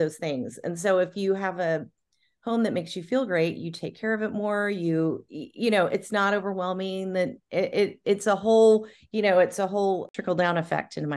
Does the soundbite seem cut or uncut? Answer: uncut